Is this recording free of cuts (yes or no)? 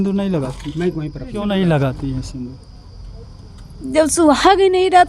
yes